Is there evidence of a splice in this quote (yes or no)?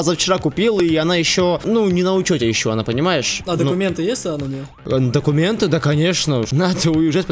yes